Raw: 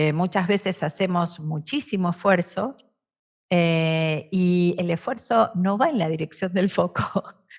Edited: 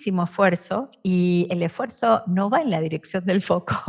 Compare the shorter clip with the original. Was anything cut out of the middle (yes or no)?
yes